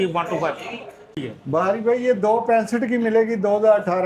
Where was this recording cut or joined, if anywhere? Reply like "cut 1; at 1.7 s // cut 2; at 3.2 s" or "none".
cut 1; at 1.2 s